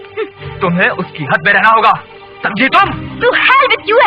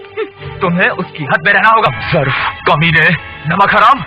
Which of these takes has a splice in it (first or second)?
second